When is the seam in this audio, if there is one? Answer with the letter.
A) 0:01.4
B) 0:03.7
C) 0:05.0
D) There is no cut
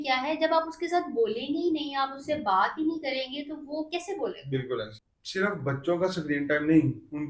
C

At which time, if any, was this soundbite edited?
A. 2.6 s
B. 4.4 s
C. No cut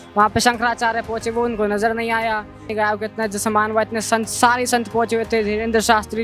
A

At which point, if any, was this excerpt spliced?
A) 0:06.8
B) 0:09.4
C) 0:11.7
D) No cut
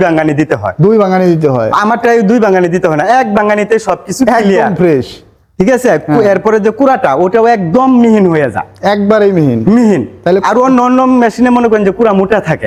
D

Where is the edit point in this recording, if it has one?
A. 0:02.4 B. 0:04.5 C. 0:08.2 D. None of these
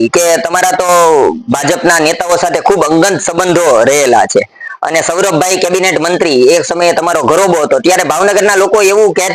D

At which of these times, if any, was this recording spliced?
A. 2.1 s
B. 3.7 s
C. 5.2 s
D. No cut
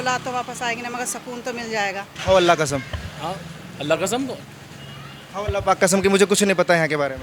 A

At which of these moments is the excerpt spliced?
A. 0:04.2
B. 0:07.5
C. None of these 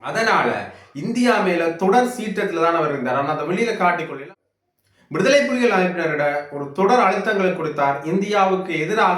A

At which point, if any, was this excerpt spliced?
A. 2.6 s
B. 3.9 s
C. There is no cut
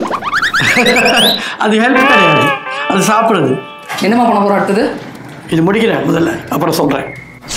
B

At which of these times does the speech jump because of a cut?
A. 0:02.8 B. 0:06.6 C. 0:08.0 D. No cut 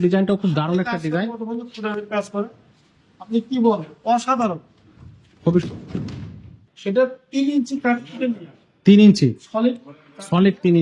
B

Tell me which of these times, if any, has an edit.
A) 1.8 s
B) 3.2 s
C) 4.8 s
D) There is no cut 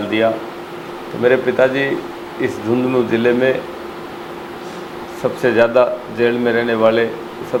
D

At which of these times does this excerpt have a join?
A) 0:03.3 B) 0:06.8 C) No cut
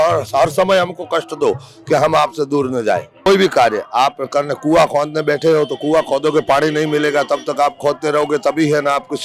A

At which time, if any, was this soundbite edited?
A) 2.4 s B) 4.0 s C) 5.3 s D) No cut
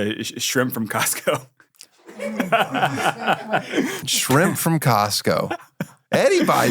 B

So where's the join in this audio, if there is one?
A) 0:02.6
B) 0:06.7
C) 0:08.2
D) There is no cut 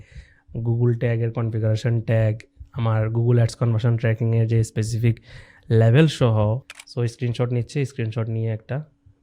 B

